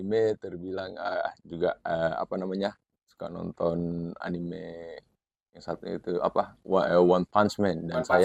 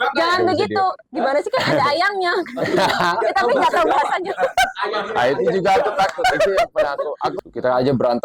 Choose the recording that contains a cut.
second; 1 cut; at 7.4 s

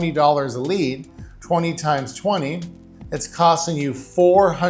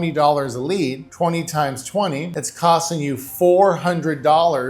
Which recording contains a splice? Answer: second; 2 cuts; at 1.0 s, 2.4 s

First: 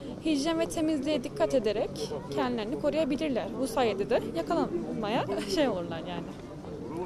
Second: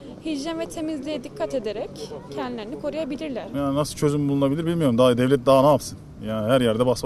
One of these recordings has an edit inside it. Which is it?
second; 1 cut; at 3.5 s

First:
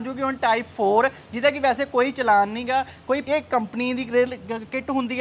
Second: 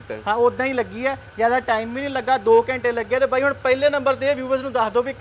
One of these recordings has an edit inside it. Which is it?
first; 1 cut; at 2.9 s

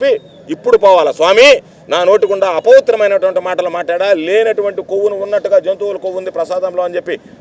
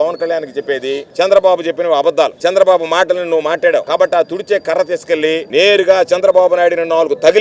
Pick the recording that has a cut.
second; 4 cuts; at 1.1 s, 2.3 s, 3.9 s, 5.4 s

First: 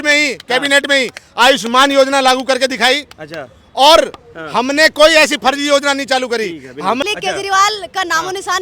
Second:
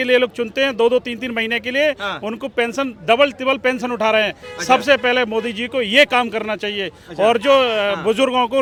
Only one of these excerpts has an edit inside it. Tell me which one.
first; 1 cut; at 7.0 s

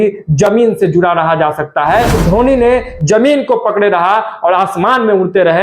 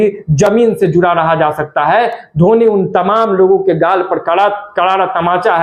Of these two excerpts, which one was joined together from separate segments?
first; 1 cut; at 2.2 s

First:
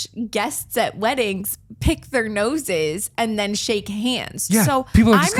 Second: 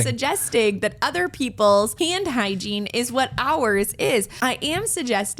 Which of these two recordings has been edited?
second; 2 cuts; at 1.9 s, 4.3 s

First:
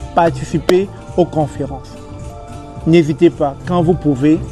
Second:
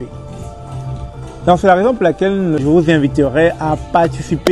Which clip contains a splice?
second; 1 cut; at 2.6 s

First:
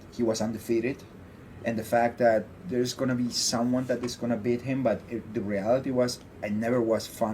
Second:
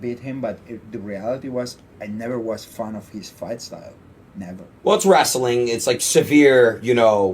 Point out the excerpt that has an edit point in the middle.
second; 1 cut; at 4.7 s

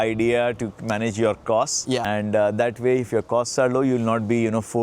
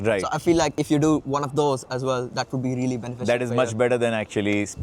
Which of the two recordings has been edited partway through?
first; 1 cut; at 2.0 s

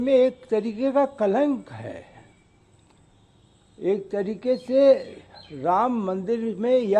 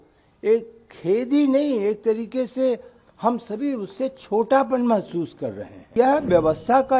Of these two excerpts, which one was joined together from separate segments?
second; 1 cut; at 5.9 s

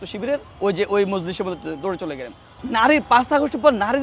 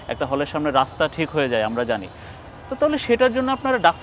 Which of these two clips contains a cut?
first; 1 cut; at 2.5 s

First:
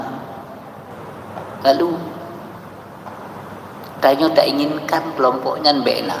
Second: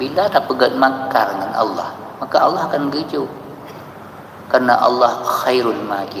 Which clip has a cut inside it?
first; 1 cut; at 0.9 s

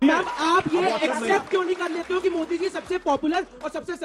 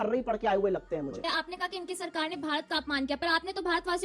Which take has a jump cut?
second; 1 cut; at 1.2 s

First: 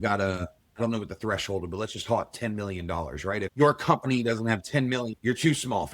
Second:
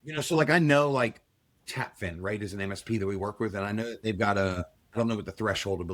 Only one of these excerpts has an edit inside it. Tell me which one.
first; 2 cuts; at 3.5 s, 5.2 s

